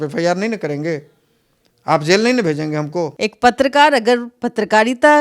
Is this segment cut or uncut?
cut